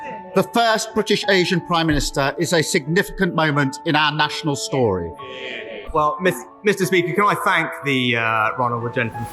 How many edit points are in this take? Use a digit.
1